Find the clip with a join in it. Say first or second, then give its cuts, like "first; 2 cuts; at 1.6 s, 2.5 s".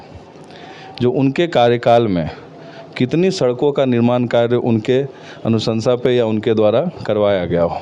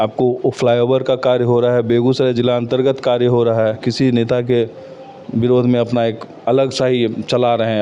second; 1 cut; at 3.9 s